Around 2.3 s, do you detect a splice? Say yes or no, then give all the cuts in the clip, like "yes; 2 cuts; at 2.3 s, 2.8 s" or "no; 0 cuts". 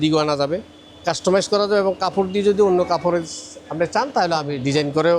no; 0 cuts